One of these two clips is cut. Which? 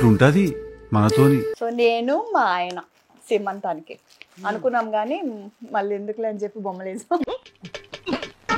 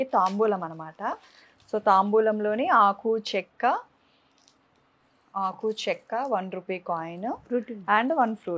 first; 1 cut; at 1.5 s

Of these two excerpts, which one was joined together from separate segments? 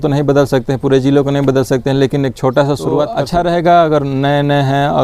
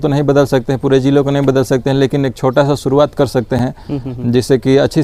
first; 1 cut; at 3.1 s

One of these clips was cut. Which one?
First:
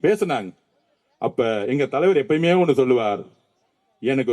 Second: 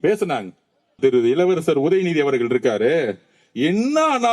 second; 1 cut; at 1.0 s

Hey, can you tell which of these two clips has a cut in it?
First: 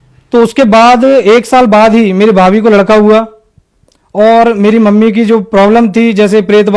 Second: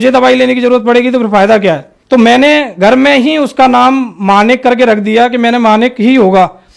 second; 1 cut; at 1.9 s

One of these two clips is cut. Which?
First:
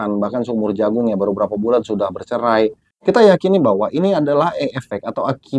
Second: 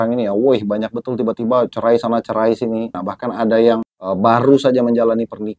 second; 2 cuts; at 3.1 s, 4.0 s

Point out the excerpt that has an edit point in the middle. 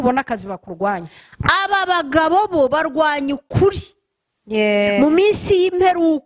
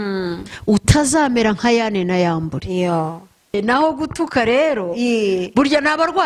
second; 1 cut; at 3.5 s

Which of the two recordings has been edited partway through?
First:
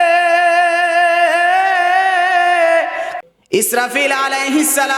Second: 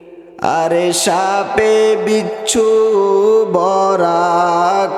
first; 1 cut; at 3.1 s

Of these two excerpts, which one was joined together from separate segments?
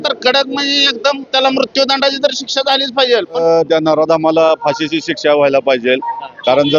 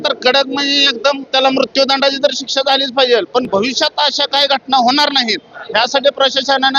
first; 1 cut; at 3.4 s

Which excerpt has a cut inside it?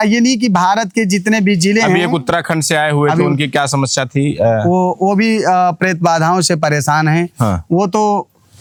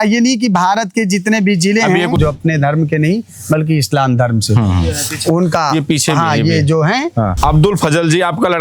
second; 2 cuts; at 2.2 s, 7.3 s

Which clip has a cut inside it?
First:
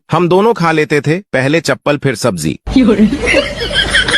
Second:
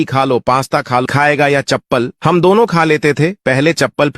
second; 1 cut; at 1.0 s

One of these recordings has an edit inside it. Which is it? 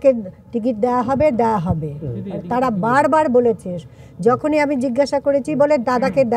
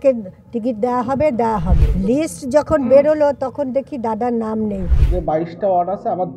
second; 2 cuts; at 1.8 s, 5.0 s

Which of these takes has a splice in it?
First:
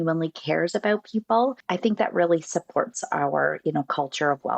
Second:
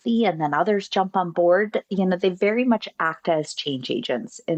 first; 1 cut; at 1.6 s

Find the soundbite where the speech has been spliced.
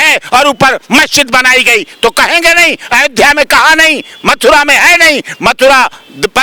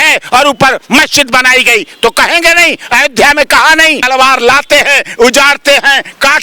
second; 1 cut; at 4.1 s

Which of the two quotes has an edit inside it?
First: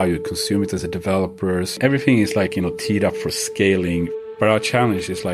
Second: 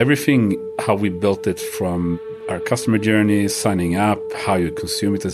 first; 2 cuts; at 1.8 s, 4.1 s

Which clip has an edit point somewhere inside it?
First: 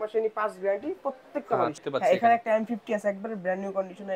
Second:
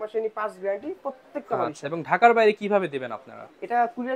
first; 1 cut; at 1.8 s

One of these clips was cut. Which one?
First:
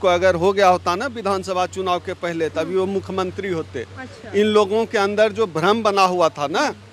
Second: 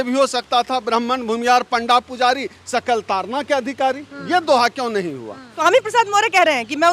second; 1 cut; at 5.5 s

